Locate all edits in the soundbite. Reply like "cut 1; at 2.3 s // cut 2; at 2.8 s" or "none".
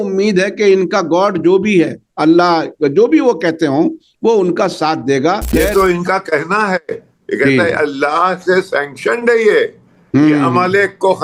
cut 1; at 5.5 s